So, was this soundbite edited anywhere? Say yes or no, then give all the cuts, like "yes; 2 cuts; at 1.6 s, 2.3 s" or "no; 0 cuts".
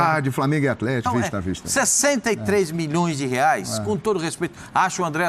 yes; 1 cut; at 1.1 s